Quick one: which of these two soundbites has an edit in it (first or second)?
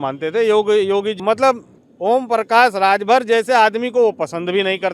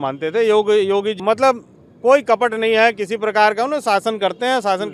first